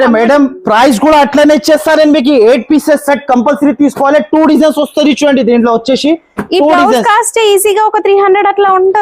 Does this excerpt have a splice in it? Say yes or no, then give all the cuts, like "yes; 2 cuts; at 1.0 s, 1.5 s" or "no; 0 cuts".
no; 0 cuts